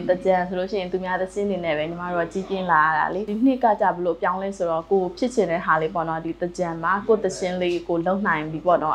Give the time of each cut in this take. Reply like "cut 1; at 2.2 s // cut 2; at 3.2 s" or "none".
cut 1; at 3.3 s